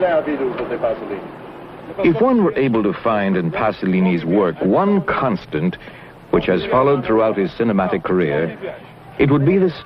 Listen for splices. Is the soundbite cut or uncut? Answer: uncut